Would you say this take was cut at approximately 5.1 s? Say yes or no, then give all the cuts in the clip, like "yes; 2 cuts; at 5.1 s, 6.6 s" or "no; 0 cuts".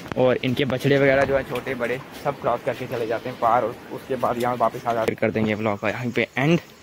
yes; 1 cut; at 5.1 s